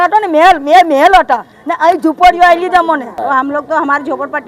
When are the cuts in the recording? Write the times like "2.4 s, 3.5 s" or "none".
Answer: 3.1 s